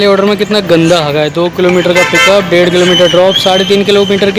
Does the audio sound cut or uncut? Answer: uncut